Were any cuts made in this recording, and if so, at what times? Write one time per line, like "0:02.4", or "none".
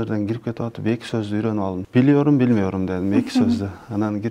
0:01.8

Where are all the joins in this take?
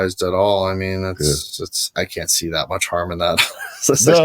0:01.9

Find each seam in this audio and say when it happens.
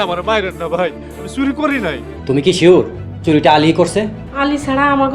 0:02.1
0:04.2

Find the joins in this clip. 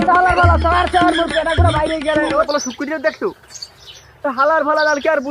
0:02.5

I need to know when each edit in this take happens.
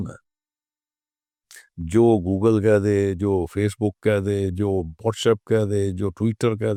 none

